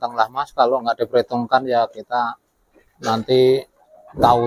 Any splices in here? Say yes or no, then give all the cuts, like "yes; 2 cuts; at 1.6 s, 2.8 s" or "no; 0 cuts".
no; 0 cuts